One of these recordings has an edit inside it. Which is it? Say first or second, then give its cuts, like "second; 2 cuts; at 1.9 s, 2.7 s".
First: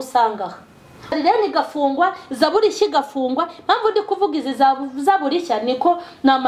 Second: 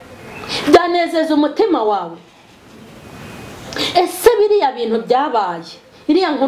first; 1 cut; at 1.1 s